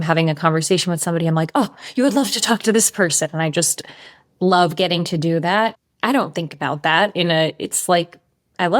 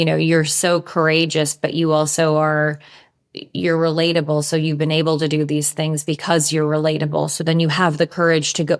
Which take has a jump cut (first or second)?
first